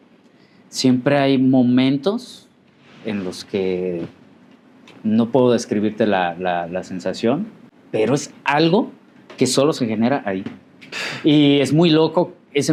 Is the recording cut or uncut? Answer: uncut